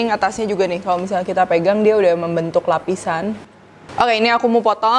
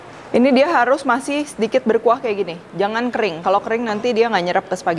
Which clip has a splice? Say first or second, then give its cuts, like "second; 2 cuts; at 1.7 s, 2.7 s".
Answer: first; 1 cut; at 3.7 s